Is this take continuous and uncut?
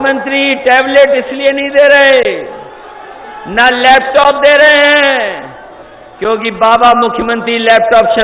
yes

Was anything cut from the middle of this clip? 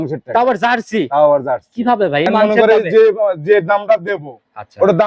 yes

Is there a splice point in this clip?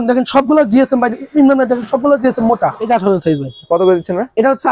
yes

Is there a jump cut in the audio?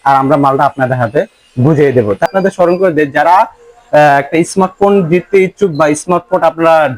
yes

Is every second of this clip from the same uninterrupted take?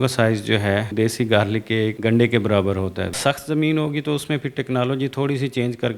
no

